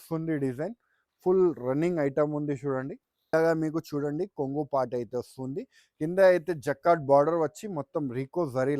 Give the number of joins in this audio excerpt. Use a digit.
1